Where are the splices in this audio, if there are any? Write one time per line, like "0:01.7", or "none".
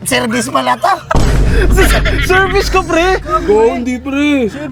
none